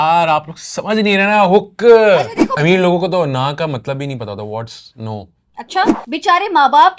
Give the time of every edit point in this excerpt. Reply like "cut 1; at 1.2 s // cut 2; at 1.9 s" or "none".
cut 1; at 2.5 s // cut 2; at 6.0 s